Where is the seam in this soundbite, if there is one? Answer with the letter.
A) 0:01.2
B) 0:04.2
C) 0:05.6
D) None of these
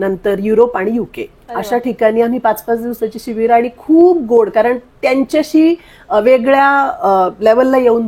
D